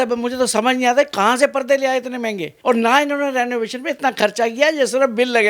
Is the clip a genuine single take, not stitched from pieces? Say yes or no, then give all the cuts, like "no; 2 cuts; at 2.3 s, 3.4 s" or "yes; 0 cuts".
no; 1 cut; at 2.4 s